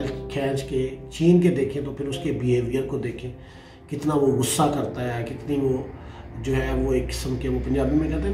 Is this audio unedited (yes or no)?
yes